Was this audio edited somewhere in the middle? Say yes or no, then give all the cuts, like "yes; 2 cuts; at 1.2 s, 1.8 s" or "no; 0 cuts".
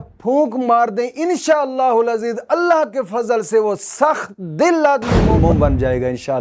no; 0 cuts